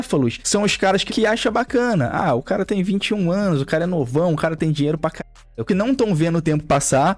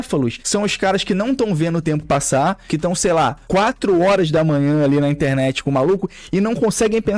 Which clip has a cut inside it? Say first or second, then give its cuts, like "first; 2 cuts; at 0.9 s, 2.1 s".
first; 2 cuts; at 1.1 s, 5.6 s